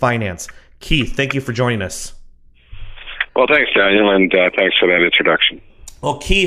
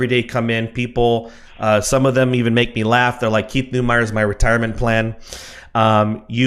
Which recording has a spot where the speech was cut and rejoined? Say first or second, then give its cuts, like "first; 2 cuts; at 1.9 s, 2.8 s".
second; 1 cut; at 0.9 s